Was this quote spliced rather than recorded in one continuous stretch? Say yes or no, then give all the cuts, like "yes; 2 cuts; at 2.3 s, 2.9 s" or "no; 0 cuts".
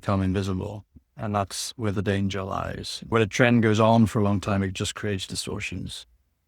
yes; 1 cut; at 3.1 s